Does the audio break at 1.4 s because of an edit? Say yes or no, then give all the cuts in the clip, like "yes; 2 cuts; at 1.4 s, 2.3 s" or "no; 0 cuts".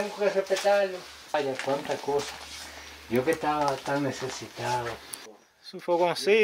yes; 2 cuts; at 1.4 s, 5.2 s